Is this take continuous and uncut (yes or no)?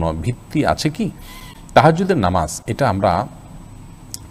yes